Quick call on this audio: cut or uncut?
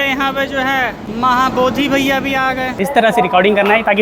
cut